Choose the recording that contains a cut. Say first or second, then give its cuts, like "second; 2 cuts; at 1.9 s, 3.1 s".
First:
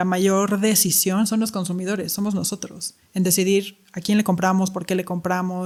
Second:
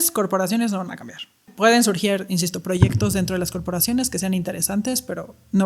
second; 1 cut; at 1.5 s